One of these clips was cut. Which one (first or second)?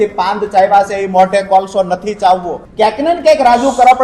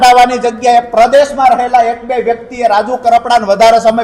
first